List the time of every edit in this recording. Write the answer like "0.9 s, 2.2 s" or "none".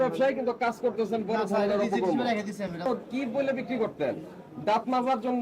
2.9 s